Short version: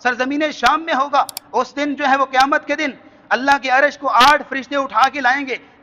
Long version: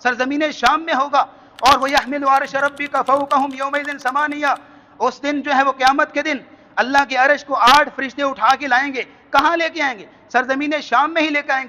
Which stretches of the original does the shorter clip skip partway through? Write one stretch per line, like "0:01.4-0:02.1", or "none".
0:01.4-0:04.9